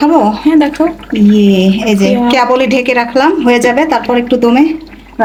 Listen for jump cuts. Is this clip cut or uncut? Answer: uncut